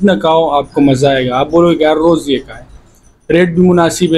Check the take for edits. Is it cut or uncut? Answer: uncut